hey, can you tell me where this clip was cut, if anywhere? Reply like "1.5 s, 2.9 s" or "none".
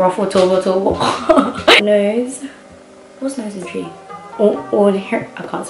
1.8 s